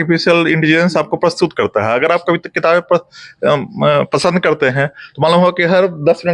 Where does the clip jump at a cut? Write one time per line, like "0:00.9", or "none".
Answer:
none